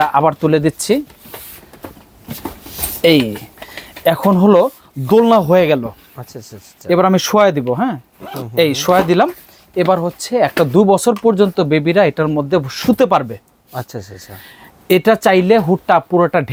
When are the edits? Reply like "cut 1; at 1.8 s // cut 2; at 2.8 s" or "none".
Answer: none